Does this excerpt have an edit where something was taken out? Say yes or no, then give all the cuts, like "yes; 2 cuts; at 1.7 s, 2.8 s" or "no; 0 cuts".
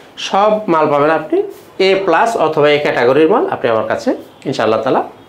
no; 0 cuts